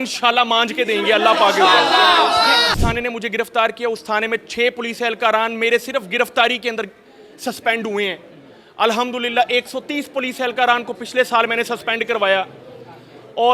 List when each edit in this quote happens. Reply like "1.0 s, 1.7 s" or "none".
2.7 s